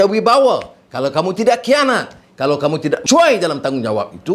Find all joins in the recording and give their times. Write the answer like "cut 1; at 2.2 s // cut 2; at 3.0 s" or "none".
cut 1; at 3.0 s